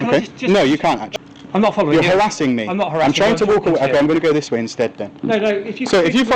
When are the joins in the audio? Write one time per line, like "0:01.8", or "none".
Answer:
0:01.1

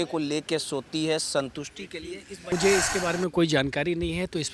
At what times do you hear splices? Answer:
0:02.5

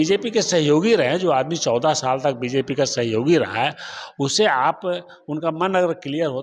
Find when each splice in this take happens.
none

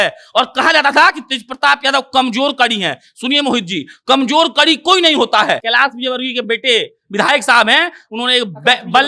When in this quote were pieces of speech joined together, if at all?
0:05.6

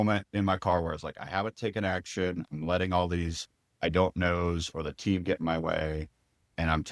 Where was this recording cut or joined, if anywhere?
none

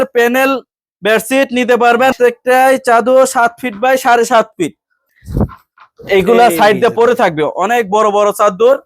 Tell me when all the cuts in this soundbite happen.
0:02.1
0:05.1

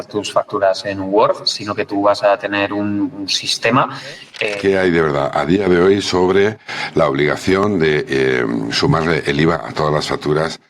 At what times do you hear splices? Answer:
0:04.3

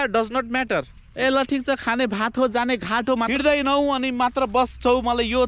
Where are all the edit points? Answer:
0:01.0
0:03.3

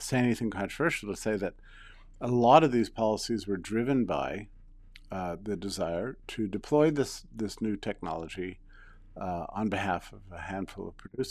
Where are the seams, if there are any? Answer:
none

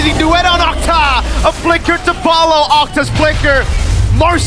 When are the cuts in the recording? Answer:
none

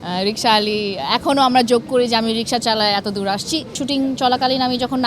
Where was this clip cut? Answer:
0:03.8

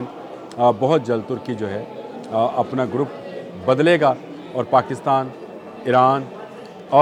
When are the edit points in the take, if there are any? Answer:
none

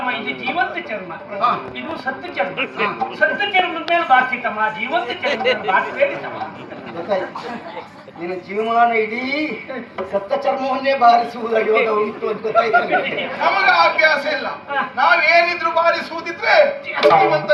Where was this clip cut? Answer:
none

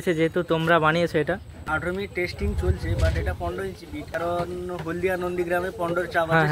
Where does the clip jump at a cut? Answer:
0:01.7
0:04.1

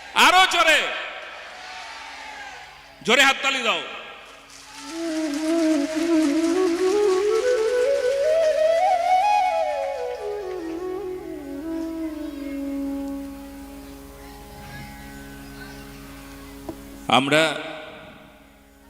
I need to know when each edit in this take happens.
none

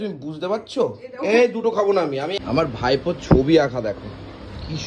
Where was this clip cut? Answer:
0:02.4

